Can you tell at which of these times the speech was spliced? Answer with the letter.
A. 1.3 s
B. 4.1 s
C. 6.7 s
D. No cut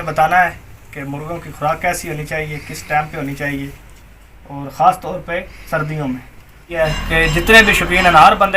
C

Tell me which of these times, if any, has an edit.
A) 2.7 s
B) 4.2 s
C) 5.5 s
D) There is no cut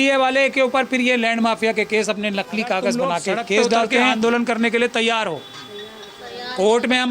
B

